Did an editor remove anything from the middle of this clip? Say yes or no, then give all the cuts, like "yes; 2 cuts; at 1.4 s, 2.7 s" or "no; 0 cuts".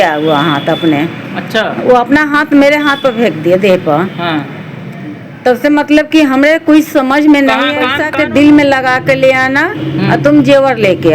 yes; 1 cut; at 8.0 s